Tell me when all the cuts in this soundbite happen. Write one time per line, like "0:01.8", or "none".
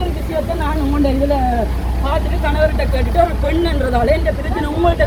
none